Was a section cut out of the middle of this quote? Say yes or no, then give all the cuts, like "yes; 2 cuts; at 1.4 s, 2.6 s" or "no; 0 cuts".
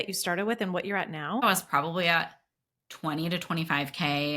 yes; 1 cut; at 1.4 s